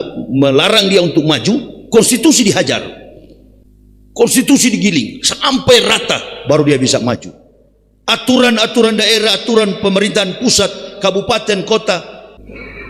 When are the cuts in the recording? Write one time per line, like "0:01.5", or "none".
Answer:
none